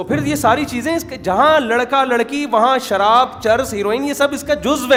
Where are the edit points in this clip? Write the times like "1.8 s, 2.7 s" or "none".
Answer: none